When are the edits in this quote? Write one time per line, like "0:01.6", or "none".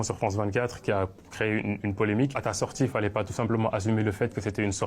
0:02.4